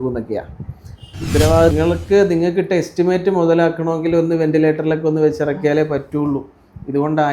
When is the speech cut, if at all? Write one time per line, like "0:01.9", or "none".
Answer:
0:01.7